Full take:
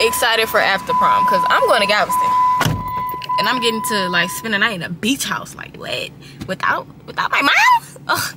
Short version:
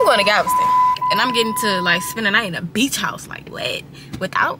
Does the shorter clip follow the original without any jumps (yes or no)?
no